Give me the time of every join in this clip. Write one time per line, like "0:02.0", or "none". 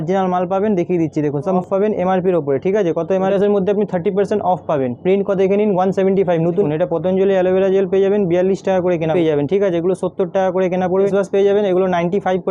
0:01.6
0:03.3
0:06.7
0:09.1
0:11.1